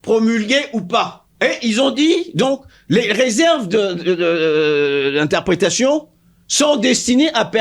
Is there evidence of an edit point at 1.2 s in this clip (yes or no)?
yes